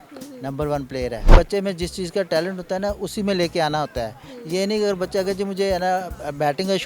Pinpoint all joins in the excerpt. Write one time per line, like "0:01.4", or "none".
0:01.3